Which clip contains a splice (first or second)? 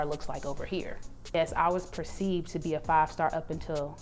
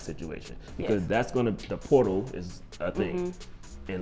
first